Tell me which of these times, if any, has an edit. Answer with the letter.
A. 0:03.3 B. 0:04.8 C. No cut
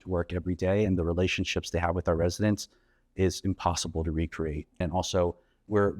B